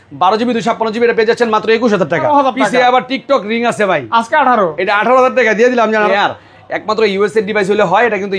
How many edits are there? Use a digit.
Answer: 2